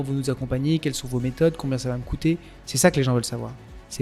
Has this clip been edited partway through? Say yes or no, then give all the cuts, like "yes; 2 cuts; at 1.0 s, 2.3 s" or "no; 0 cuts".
no; 0 cuts